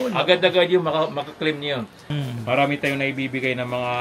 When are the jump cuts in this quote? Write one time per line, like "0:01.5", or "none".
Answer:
0:02.1